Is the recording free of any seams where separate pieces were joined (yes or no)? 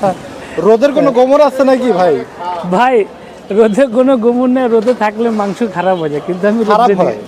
yes